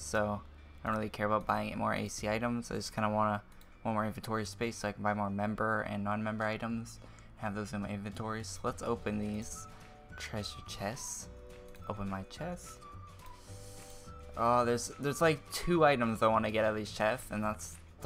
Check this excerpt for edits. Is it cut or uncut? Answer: cut